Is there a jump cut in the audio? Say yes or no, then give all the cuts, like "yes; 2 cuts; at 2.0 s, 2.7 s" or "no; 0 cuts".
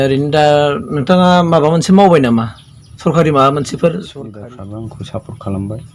yes; 1 cut; at 4.4 s